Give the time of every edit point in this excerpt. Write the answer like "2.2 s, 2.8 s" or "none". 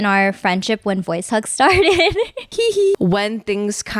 2.8 s